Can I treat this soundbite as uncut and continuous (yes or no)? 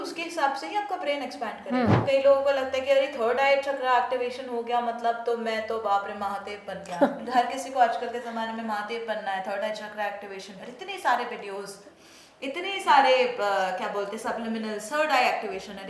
no